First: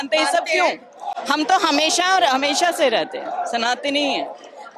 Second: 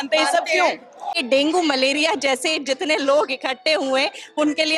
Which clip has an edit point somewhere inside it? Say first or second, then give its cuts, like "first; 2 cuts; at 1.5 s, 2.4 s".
second; 1 cut; at 1.1 s